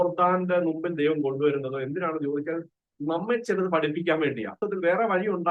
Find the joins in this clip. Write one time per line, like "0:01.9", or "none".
0:04.6